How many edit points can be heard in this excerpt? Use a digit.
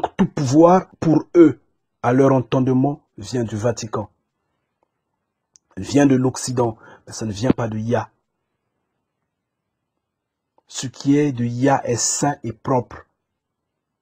1